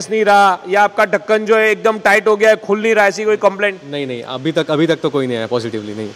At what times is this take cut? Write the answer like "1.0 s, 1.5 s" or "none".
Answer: none